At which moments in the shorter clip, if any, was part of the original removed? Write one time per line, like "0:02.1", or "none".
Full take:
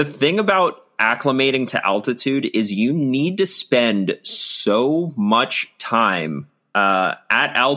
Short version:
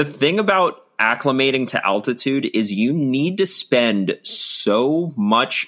none